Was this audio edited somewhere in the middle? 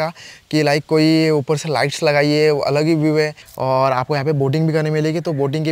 yes; 1 cut; at 3.5 s

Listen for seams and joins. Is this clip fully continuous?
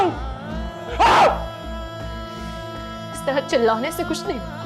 yes; 0 cuts

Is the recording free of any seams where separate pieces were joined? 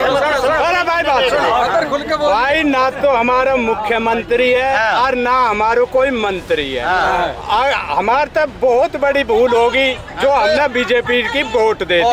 yes; 0 cuts

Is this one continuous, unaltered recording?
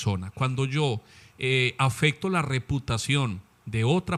yes; 0 cuts

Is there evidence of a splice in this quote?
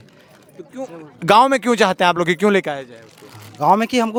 no; 0 cuts

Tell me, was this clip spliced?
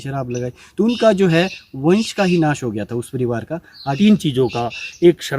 yes; 1 cut; at 3.9 s

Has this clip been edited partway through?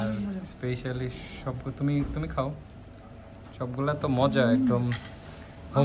no; 0 cuts

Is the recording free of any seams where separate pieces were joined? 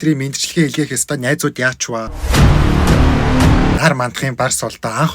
no; 2 cuts; at 2.2 s, 3.8 s

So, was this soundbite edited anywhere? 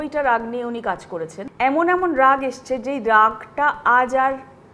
yes; 1 cut; at 1.4 s

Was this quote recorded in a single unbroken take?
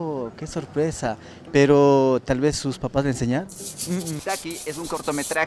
no; 1 cut; at 4.2 s

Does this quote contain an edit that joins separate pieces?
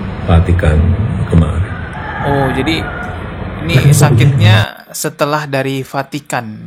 no; 0 cuts

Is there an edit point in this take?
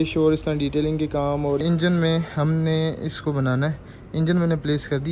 yes; 1 cut; at 1.6 s

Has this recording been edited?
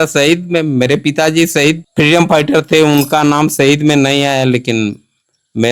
yes; 1 cut; at 1.9 s

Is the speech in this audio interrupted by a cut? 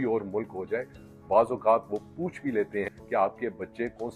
yes; 2 cuts; at 1.0 s, 2.9 s

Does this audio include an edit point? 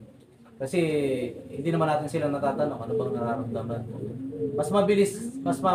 no; 0 cuts

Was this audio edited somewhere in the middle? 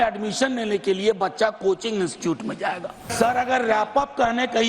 yes; 1 cut; at 3.1 s

